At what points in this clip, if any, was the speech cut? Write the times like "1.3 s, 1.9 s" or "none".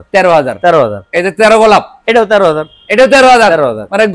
none